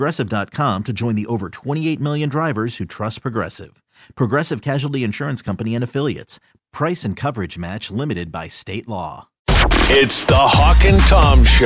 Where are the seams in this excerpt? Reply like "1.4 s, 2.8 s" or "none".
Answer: 9.3 s